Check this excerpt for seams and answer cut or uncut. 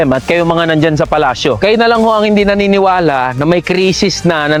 uncut